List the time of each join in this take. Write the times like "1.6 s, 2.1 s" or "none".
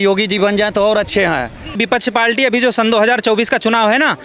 1.8 s